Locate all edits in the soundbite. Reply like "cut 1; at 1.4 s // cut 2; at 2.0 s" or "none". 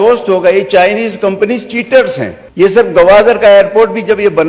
cut 1; at 2.4 s